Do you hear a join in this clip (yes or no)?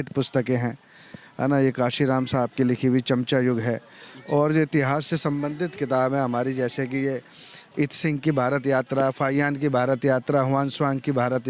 no